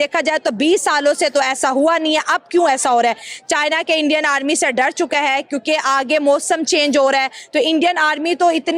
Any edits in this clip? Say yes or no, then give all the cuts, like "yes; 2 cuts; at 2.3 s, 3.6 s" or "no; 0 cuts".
no; 0 cuts